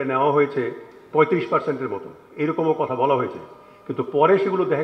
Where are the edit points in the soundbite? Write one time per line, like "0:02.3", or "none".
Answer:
none